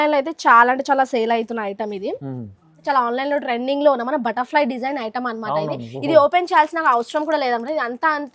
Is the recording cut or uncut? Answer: cut